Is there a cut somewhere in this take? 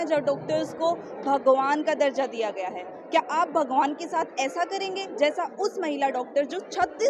no; 0 cuts

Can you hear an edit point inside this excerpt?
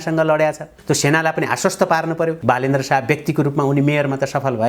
yes; 1 cut; at 2.4 s

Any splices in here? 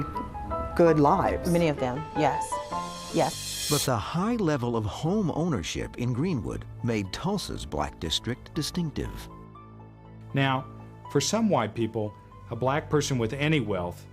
yes; 1 cut; at 3.4 s

